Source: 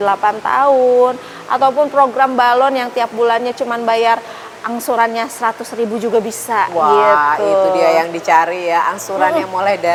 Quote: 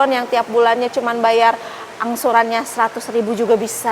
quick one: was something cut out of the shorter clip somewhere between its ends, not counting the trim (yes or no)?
no